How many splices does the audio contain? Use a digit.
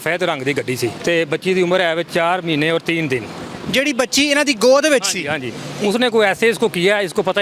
2